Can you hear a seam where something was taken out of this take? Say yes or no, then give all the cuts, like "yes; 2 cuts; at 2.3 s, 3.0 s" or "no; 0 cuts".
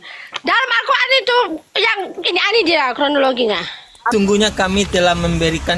yes; 1 cut; at 4.1 s